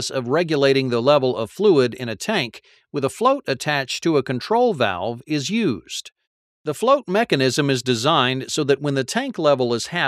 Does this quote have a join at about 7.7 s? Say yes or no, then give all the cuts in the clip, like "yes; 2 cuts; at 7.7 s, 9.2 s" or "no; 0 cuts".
yes; 1 cut; at 7.7 s